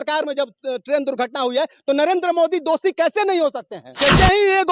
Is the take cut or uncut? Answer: cut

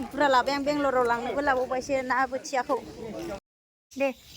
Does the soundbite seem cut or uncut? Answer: cut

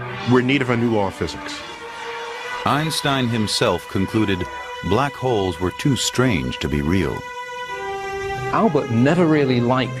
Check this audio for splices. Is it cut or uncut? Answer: cut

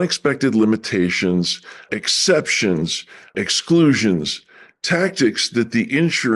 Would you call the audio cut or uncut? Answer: cut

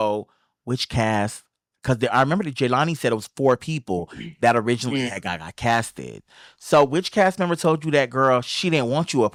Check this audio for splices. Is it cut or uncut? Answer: uncut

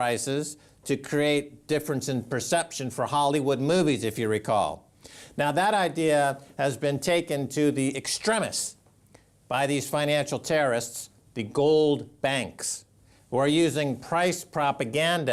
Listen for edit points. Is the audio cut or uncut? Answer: uncut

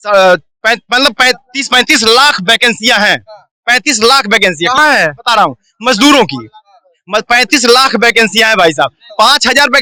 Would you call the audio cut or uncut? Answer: uncut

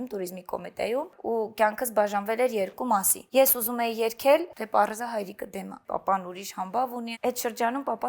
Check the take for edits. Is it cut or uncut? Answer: cut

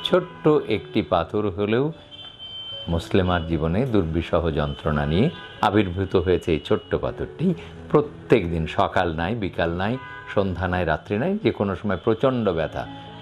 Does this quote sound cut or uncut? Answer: uncut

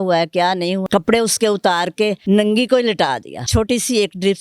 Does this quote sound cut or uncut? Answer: cut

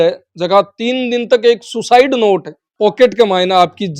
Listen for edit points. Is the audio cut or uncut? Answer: cut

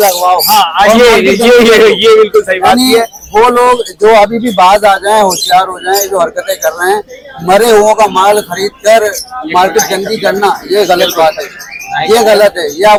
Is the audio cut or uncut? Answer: uncut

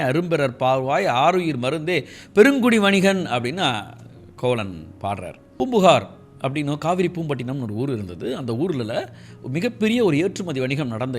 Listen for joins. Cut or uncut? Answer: cut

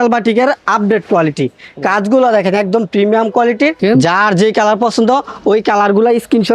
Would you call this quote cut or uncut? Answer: cut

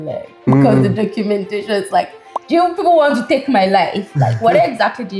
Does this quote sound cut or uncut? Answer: uncut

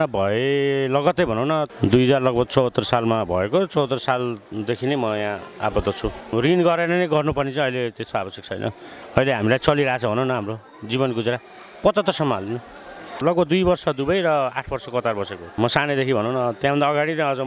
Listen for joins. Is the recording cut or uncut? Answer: cut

